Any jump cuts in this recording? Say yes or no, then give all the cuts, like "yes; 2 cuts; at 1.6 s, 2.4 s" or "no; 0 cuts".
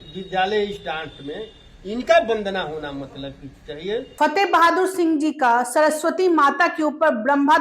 yes; 1 cut; at 4.1 s